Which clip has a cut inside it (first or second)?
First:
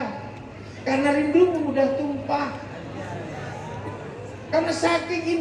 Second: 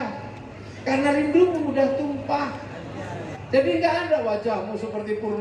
second